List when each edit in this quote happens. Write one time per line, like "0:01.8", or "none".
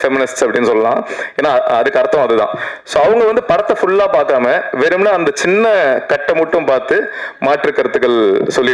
none